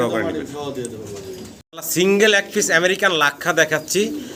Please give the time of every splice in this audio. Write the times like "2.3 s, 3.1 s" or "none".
none